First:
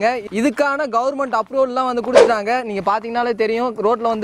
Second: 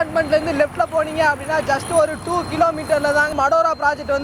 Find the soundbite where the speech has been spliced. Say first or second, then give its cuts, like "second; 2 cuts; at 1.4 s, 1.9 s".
second; 1 cut; at 3.3 s